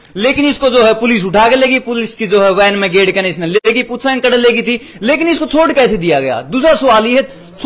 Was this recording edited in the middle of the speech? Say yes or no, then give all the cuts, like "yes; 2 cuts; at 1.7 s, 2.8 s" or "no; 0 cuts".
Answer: no; 0 cuts